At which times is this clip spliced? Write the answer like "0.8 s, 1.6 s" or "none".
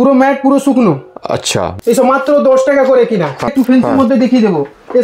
1.7 s, 3.5 s